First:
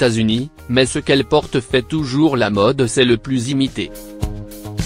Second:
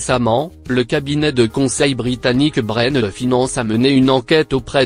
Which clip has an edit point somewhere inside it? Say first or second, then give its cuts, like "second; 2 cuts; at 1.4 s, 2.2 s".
first; 1 cut; at 3.9 s